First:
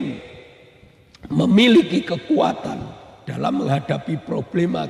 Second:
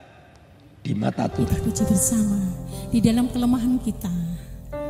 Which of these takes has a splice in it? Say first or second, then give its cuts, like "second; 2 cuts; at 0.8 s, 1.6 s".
second; 1 cut; at 1.4 s